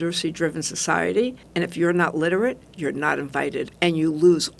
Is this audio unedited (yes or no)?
no